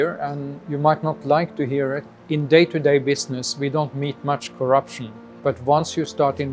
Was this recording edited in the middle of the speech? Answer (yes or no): yes